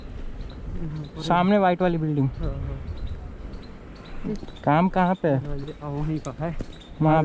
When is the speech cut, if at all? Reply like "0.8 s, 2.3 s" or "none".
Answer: 4.3 s

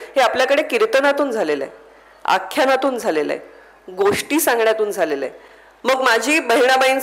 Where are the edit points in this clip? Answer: none

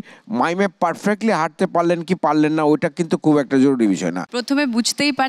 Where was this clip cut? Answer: 4.2 s

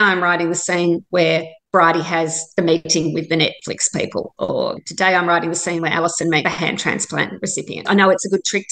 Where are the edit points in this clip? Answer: 7.8 s

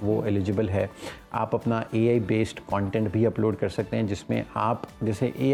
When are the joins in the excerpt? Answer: none

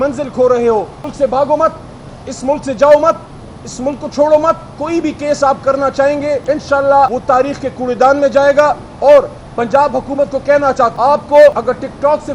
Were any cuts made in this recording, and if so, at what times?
1.0 s, 4.7 s, 6.4 s, 7.2 s, 10.9 s, 11.5 s

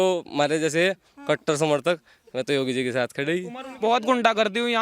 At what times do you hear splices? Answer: 3.6 s

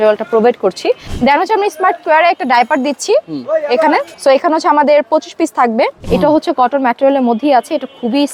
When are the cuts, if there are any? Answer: 1.1 s, 4.1 s, 6.0 s

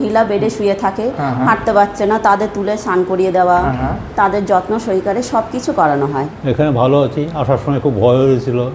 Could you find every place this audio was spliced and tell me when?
6.3 s

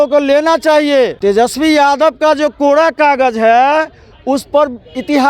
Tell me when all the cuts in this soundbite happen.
1.1 s

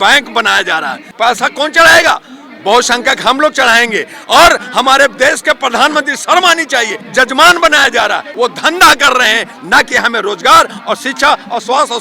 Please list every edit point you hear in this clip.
1.0 s, 7.0 s, 8.3 s

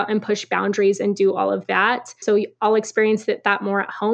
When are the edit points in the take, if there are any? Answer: 2.2 s

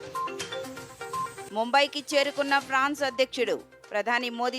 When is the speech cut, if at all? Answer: 1.0 s

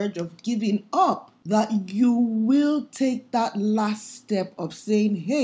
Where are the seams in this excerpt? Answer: 1.3 s

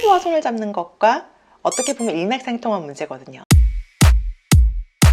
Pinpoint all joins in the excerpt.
3.3 s

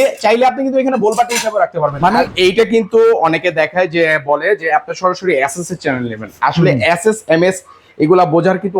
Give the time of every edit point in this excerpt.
2.3 s

